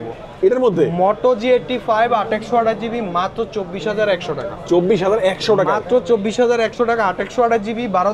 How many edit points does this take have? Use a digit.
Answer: 0